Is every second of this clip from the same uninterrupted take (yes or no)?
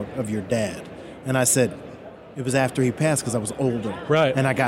yes